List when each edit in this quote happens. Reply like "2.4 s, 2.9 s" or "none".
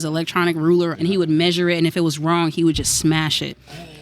0.9 s